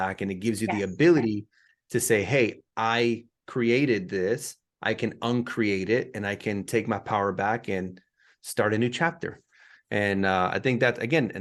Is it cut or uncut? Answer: uncut